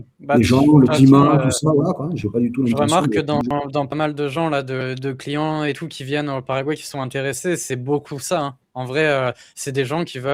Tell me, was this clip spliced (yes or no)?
no